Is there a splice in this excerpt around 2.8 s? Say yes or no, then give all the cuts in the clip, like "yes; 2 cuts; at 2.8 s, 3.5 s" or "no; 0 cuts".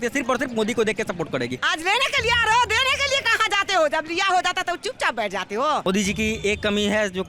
no; 2 cuts; at 1.6 s, 5.8 s